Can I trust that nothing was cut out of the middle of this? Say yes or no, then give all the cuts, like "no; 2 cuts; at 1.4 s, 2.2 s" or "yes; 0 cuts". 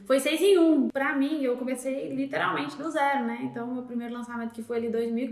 no; 1 cut; at 0.9 s